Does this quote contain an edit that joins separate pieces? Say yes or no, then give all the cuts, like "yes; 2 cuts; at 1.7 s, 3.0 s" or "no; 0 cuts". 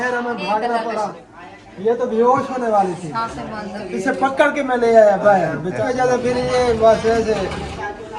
yes; 2 cuts; at 1.3 s, 5.8 s